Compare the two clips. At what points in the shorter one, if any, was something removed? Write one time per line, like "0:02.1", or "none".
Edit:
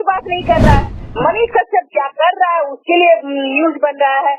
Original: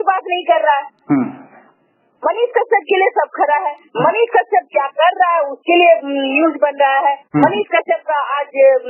0:01.0

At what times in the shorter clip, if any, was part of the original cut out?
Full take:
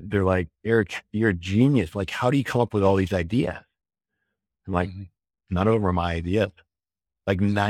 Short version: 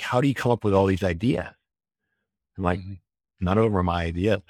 none

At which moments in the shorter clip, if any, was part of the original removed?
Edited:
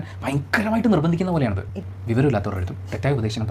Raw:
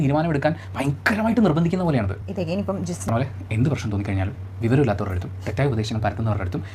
0:01.8

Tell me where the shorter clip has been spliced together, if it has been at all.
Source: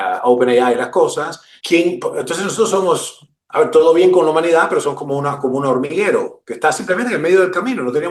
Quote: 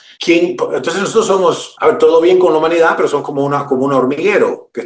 0:01.7

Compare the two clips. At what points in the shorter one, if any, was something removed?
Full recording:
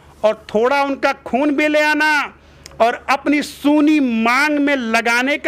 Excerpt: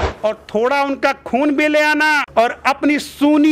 0:02.2

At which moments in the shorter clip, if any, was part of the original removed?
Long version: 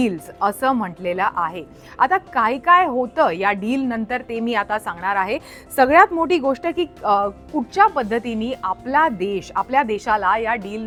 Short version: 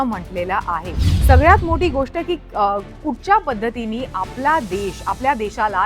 0:01.1

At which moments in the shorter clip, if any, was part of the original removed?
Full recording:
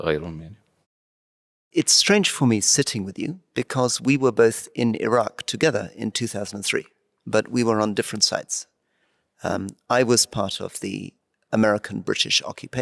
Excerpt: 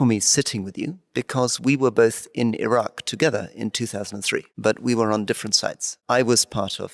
0:04.5
0:05.9

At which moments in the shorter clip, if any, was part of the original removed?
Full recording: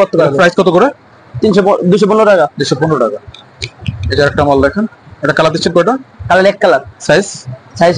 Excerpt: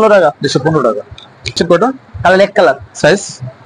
0:01.6

